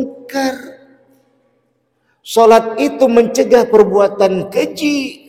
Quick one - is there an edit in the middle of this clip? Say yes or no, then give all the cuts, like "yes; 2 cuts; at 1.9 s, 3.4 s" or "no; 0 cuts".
no; 0 cuts